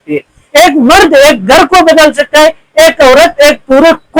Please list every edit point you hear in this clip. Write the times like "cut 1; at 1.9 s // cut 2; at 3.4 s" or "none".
none